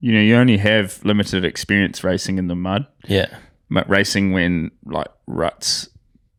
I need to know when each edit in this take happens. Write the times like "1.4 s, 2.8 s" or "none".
none